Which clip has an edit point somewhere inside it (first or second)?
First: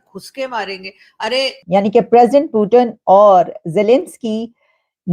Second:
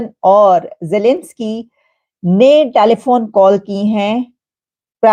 first